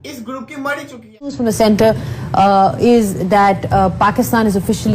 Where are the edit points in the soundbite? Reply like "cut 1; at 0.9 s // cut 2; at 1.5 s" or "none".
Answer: cut 1; at 1.4 s